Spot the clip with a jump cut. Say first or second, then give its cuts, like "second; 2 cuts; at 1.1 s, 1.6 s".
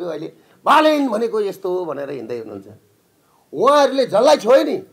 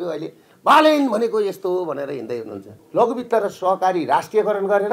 second; 1 cut; at 2.8 s